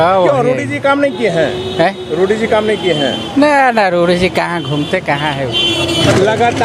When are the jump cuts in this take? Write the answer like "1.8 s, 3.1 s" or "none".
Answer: none